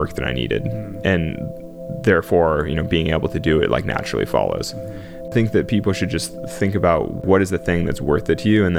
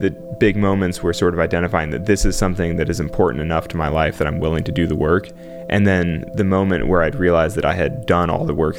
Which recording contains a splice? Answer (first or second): first